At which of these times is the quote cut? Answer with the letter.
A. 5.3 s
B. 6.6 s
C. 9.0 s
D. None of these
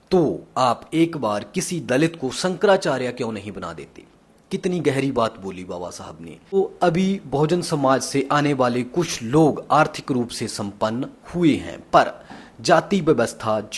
B